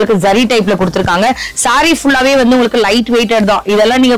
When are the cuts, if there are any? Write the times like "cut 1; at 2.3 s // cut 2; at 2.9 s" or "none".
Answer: none